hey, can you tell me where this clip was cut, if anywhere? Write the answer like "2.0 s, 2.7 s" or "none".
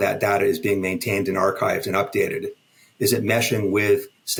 none

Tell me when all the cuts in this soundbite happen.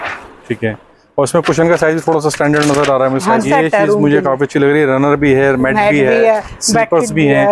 3.4 s

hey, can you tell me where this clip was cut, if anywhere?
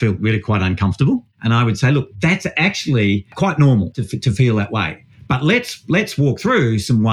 1.3 s, 3.3 s, 4.0 s

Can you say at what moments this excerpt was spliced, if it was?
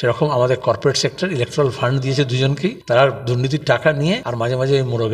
2.8 s, 4.3 s

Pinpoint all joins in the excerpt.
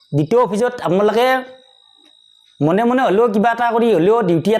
none

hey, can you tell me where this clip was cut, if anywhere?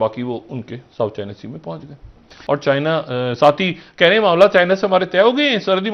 none

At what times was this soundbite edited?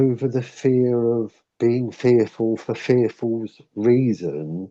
1.4 s

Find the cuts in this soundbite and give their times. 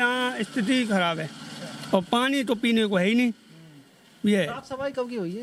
none

